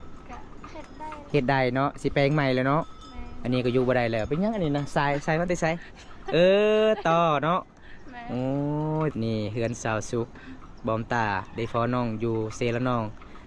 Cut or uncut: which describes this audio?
cut